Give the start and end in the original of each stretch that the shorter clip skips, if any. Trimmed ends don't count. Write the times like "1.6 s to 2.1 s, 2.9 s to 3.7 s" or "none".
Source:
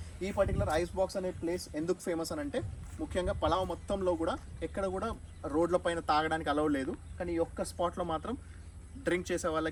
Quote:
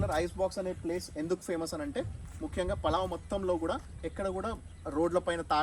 none

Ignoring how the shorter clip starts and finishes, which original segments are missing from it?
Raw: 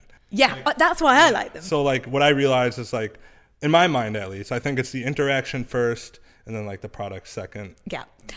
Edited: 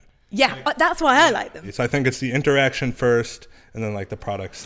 1.6 s to 4.3 s

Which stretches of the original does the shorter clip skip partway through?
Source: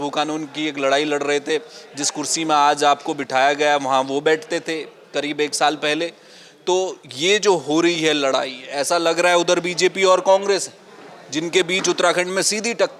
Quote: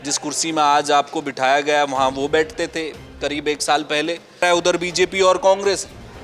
6.3 s to 9.2 s

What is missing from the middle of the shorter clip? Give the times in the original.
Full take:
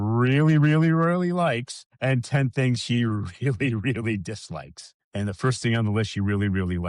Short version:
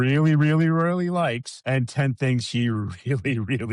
1.7 s to 1.9 s

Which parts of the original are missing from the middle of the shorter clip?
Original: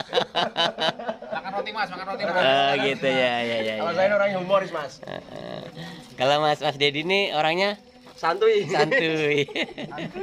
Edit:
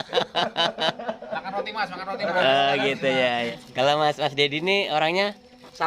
3.5 s to 5.9 s

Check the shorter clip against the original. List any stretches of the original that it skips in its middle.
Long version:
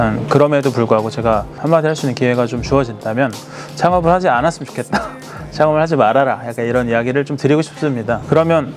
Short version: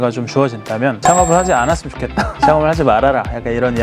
3.3 s to 3.7 s, 5.0 s to 5.4 s

